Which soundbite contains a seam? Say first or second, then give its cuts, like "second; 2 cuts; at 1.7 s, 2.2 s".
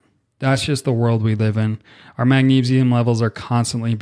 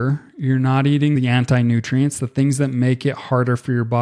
second; 1 cut; at 1.1 s